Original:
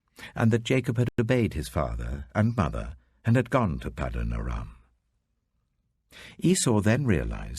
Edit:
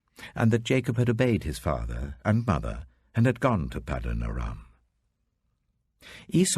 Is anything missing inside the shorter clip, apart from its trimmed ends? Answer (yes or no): yes